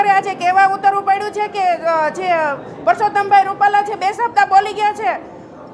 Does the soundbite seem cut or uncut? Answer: uncut